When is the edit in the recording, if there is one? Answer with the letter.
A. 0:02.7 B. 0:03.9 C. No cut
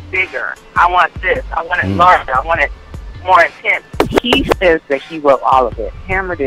B